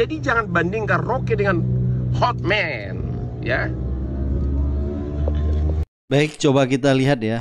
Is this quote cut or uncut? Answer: uncut